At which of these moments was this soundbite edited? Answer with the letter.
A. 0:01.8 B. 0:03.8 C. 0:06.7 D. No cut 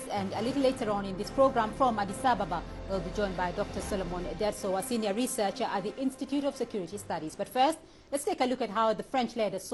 B